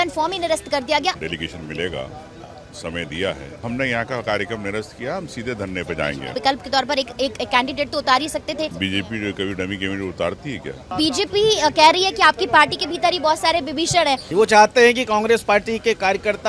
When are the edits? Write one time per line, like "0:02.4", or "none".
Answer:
0:01.2
0:03.6
0:06.3
0:08.7
0:10.9
0:14.2